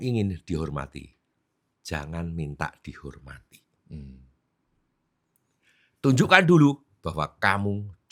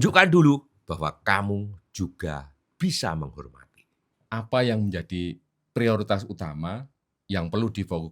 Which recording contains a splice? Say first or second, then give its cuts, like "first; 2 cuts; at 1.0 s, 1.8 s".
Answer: second; 1 cut; at 4.2 s